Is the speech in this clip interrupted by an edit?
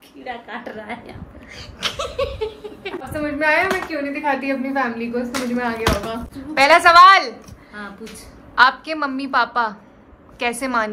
no; 0 cuts

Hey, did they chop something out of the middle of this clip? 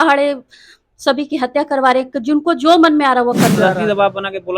yes; 1 cut; at 3.6 s

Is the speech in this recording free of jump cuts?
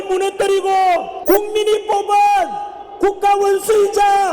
no; 1 cut; at 1.1 s

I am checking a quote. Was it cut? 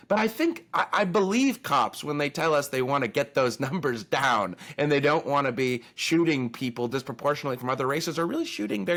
no; 0 cuts

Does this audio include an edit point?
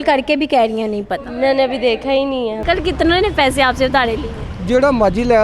yes; 1 cut; at 2.6 s

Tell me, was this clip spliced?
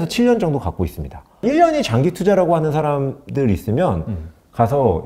yes; 1 cut; at 1.4 s

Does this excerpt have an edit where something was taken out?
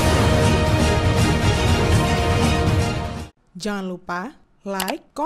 yes; 1 cut; at 3.1 s

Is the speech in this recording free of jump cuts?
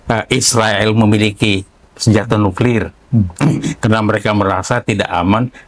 yes; 0 cuts

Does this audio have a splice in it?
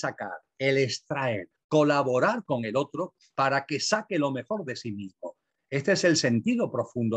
yes; 1 cut; at 1.5 s

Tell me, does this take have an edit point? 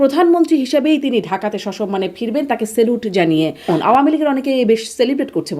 yes; 1 cut; at 3.7 s

